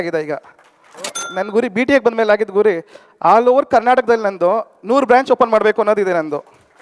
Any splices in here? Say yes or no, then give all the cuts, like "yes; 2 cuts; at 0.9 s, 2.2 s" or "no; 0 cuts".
yes; 1 cut; at 1.2 s